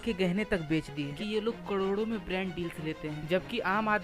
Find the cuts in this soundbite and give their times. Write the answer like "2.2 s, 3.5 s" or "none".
1.1 s

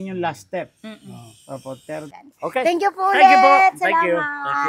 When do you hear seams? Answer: 2.1 s

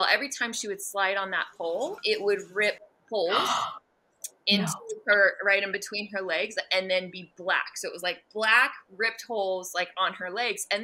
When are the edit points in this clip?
2.0 s

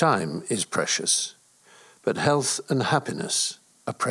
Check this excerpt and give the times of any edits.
none

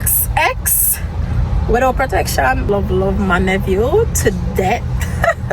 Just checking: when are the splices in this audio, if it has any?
2.7 s

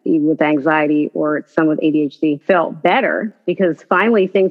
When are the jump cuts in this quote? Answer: 2.4 s, 3.3 s

